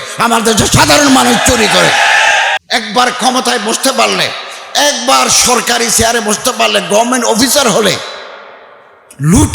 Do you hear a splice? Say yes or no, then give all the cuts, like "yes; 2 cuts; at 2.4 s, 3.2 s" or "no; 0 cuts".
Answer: yes; 1 cut; at 2.6 s